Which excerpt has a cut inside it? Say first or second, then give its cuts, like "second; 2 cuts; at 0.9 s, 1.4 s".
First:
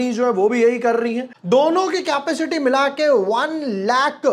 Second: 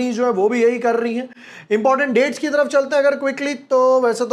first; 1 cut; at 1.3 s